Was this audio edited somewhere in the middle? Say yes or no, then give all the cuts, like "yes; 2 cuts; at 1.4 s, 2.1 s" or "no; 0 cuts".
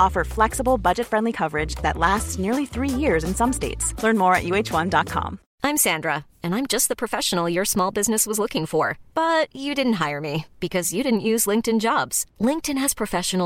no; 0 cuts